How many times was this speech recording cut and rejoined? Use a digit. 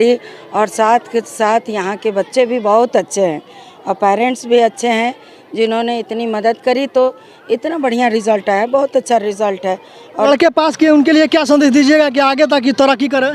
1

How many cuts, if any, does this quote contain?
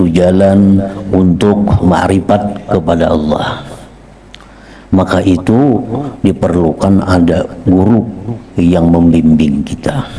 0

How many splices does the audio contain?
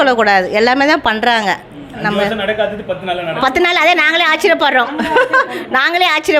0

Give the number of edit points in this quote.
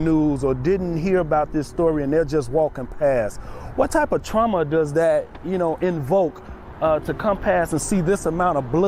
0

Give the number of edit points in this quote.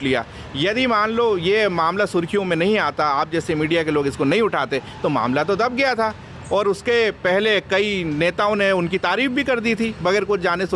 0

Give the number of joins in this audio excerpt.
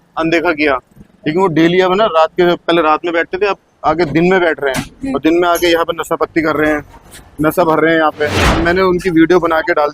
1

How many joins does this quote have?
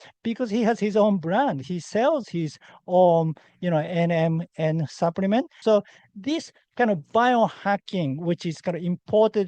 1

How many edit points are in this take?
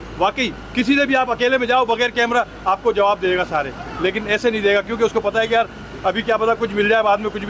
0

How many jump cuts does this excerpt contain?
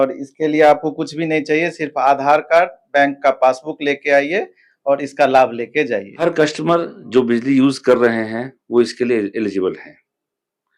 1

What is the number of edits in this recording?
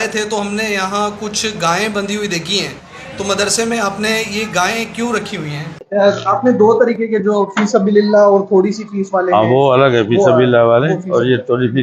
1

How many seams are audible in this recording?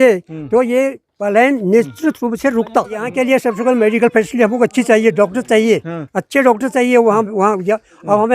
1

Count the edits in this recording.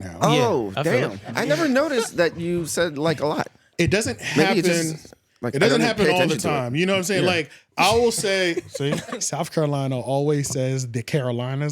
2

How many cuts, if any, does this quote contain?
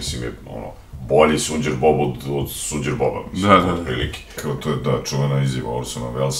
1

